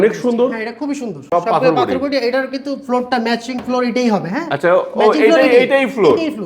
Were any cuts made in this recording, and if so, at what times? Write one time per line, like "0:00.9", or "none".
0:01.2